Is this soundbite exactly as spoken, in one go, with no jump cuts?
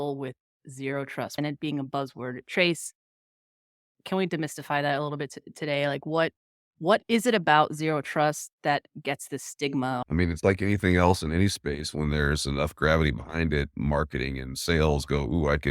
no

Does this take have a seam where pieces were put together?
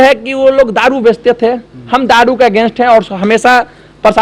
no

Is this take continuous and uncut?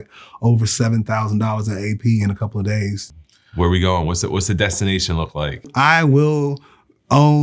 no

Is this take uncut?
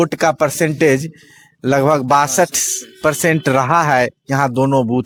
yes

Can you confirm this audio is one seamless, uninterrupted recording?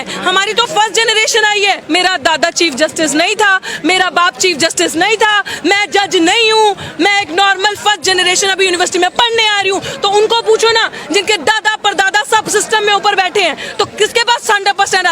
no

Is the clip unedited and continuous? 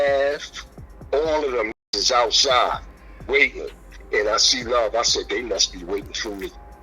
no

